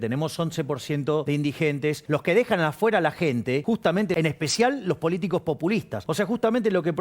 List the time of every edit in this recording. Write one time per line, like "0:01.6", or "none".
0:01.2
0:02.0
0:03.9
0:06.0